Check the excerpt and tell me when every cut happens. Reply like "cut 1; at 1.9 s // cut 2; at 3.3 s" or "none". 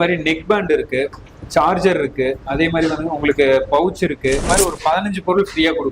cut 1; at 4.4 s